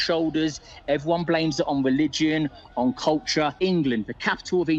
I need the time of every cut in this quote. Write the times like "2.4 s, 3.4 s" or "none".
3.5 s